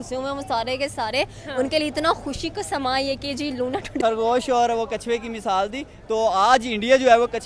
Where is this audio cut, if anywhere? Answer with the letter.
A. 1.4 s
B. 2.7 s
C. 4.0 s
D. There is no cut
C